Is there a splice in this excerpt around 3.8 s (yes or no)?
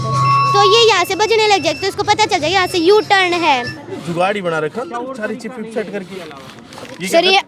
yes